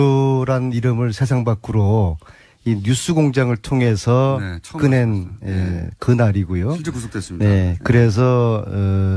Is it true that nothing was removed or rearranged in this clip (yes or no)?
no